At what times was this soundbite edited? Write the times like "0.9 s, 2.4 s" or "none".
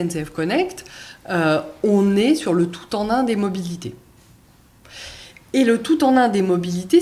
none